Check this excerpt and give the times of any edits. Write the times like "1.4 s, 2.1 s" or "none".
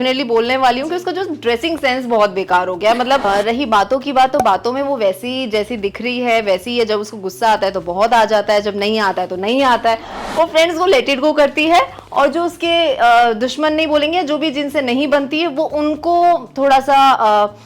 3.2 s, 10.2 s